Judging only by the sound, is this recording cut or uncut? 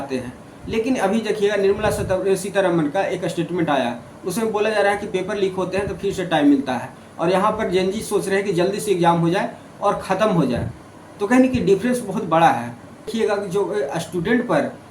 cut